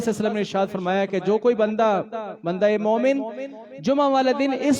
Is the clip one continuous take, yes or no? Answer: yes